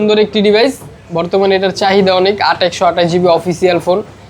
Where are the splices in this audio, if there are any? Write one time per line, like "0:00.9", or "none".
none